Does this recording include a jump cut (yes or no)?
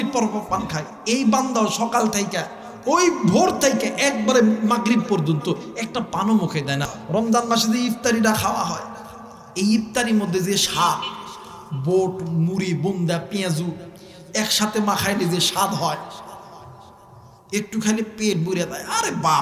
yes